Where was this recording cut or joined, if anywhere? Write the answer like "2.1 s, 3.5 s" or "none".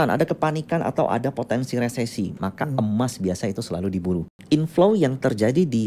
4.3 s